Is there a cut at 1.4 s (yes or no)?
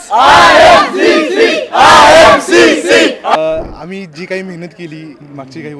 no